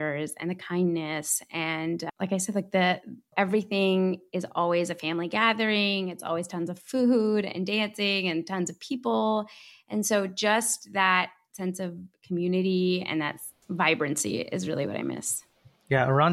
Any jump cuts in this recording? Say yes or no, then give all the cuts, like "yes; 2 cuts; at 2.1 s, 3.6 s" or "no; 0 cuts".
no; 0 cuts